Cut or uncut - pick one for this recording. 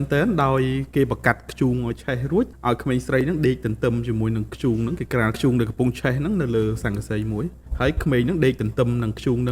cut